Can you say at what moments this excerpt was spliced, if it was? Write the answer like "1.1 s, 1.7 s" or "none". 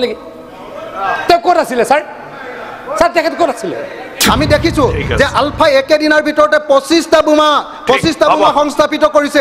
4.1 s